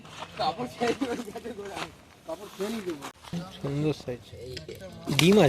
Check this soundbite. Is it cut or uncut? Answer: cut